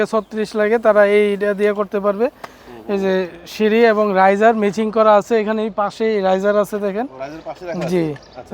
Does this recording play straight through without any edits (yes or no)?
yes